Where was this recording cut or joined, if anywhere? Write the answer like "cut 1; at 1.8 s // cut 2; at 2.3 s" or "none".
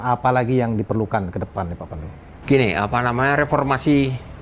none